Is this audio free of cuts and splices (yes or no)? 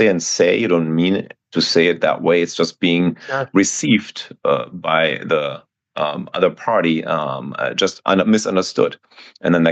yes